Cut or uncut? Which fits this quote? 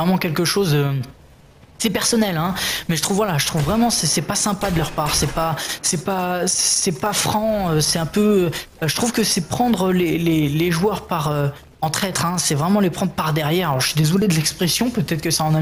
cut